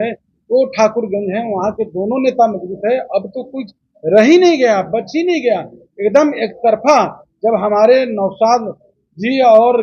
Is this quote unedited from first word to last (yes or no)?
yes